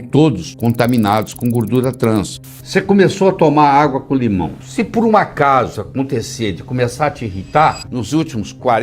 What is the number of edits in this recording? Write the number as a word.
three